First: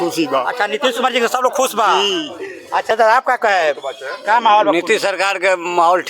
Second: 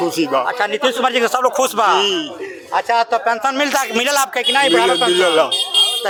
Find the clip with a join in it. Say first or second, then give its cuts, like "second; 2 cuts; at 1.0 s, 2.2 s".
first; 1 cut; at 2.9 s